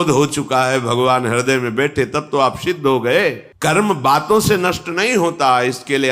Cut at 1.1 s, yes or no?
no